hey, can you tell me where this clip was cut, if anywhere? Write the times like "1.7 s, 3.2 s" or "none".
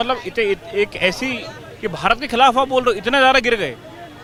none